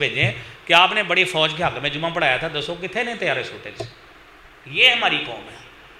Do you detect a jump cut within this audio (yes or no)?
no